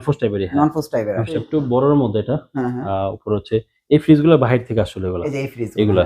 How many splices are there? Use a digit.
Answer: 1